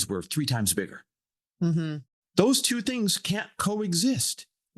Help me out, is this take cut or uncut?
cut